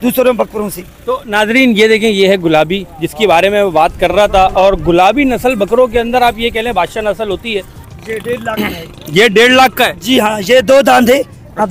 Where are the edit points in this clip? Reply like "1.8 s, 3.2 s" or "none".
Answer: 7.8 s